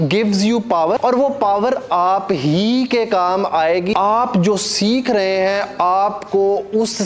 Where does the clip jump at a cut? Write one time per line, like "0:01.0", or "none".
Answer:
0:01.0
0:03.9